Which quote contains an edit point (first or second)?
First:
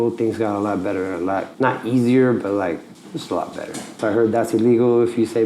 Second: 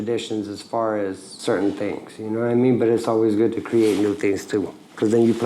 first